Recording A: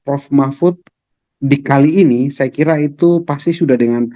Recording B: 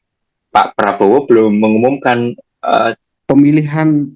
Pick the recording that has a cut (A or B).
B